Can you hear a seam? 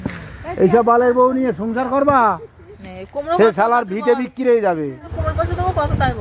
yes; 1 cut; at 5.1 s

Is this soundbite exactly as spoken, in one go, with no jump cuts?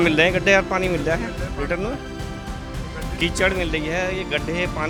yes; 0 cuts

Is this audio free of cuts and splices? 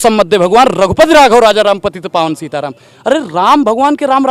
yes; 0 cuts

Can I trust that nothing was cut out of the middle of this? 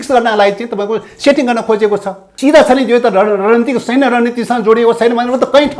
no; 1 cut; at 2.2 s

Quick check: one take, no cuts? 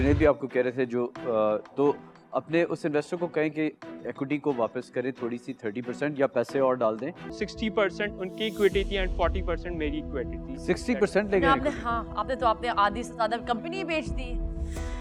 no; 1 cut; at 7.3 s

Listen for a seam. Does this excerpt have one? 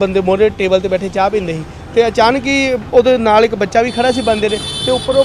no; 0 cuts

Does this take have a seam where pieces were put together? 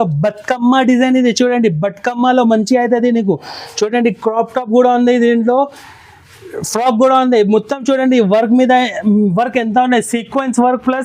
no; 0 cuts

